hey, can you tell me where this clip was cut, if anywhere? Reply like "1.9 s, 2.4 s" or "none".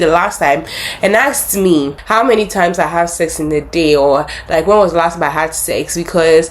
2.0 s